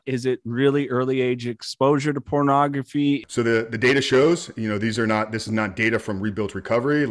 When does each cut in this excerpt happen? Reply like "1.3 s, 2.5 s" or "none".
3.2 s